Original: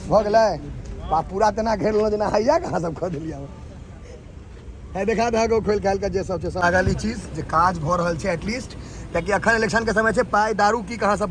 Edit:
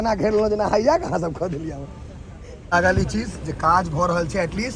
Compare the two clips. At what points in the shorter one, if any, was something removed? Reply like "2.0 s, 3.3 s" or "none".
2.7 s